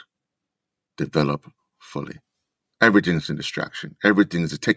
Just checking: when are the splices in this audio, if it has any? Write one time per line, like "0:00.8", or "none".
none